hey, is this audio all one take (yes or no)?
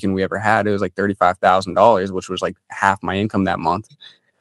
yes